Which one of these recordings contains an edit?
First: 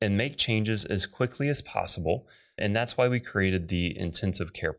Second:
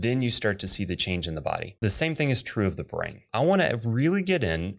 second; 2 cuts; at 1.7 s, 3.2 s

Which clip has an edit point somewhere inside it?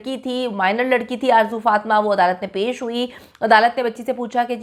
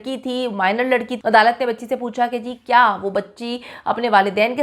second; 1 cut; at 1.1 s

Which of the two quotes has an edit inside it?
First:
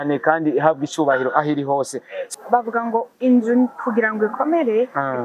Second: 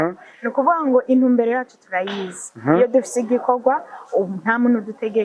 first; 1 cut; at 2.2 s

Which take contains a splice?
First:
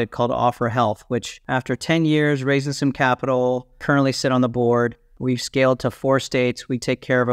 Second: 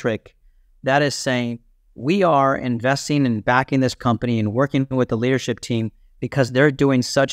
first; 3 cuts; at 1.4 s, 3.8 s, 5.2 s

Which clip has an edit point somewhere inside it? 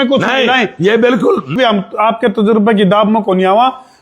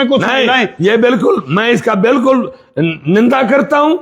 first; 1 cut; at 1.6 s

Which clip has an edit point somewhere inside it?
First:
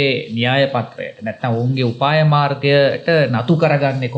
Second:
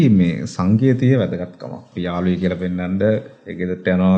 second; 1 cut; at 1.8 s

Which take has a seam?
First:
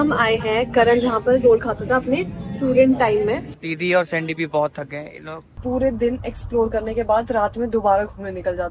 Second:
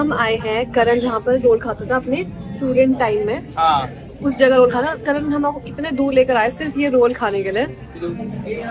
first; 2 cuts; at 3.5 s, 5.5 s

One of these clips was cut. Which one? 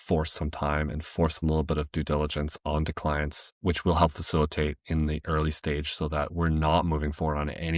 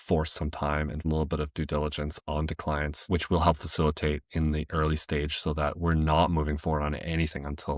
second; 2 cuts; at 1.0 s, 3.0 s

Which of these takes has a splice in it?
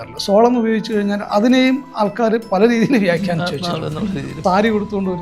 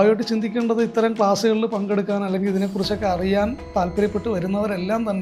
first; 1 cut; at 4.3 s

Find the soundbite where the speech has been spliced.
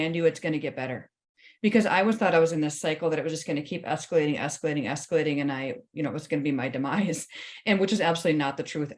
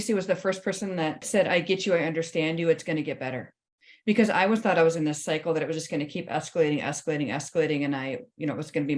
second; 1 cut; at 1.2 s

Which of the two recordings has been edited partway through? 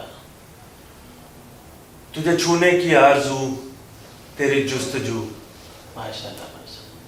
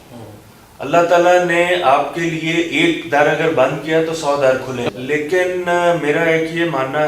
second; 1 cut; at 4.9 s

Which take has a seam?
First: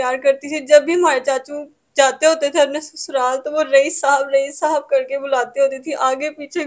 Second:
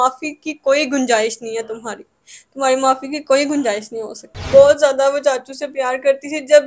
second; 1 cut; at 4.3 s

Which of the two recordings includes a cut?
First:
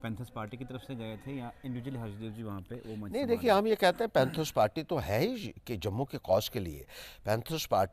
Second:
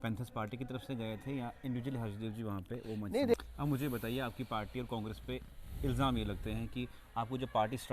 second; 1 cut; at 3.3 s

